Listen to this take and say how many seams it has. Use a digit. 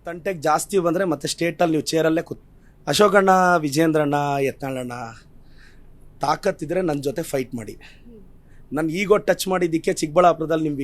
1